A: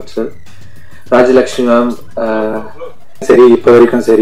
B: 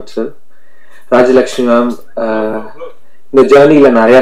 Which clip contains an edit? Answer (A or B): A